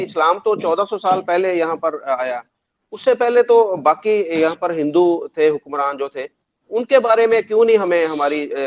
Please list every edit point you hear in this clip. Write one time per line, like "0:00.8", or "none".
none